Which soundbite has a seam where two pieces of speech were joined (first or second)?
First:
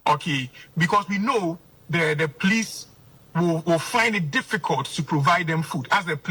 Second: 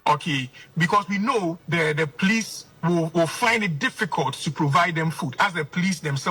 second